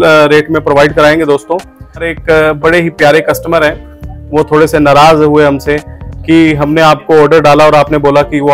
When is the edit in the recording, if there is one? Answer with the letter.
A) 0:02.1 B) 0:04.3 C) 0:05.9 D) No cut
A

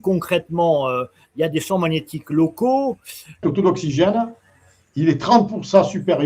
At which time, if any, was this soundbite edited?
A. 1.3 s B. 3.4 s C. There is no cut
B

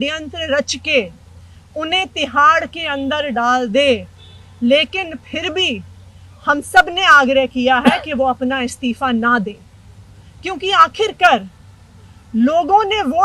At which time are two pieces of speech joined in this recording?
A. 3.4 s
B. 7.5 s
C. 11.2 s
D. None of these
D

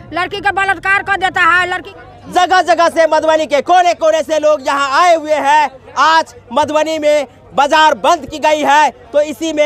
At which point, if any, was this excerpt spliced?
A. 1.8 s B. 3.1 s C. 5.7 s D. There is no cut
A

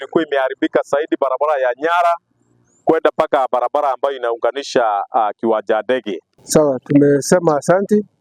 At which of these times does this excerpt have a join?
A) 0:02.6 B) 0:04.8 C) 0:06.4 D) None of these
C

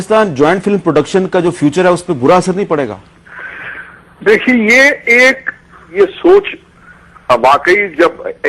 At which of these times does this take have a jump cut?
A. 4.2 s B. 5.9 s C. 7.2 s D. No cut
B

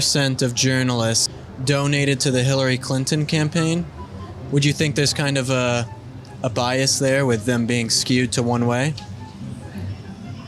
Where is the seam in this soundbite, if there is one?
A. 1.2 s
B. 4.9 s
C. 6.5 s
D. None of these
A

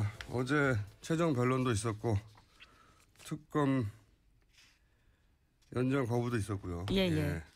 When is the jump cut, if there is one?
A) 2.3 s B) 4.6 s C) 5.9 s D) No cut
C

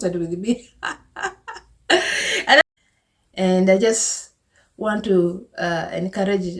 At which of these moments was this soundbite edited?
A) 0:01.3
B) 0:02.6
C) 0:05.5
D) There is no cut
B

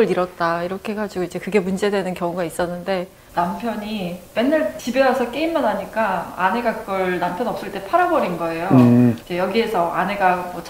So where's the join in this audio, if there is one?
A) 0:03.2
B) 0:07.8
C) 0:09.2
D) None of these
A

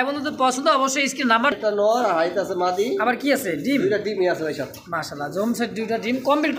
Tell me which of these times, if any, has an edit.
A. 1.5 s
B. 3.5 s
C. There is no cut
A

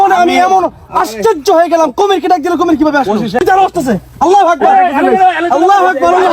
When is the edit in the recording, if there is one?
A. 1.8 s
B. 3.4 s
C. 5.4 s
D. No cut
B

